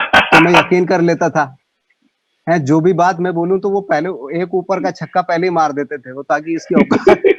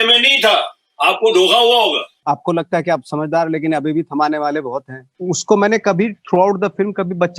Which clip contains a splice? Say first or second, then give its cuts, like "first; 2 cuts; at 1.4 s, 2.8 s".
second; 2 cuts; at 2.2 s, 5.1 s